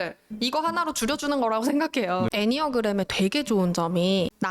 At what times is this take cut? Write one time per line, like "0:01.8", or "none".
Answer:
0:02.3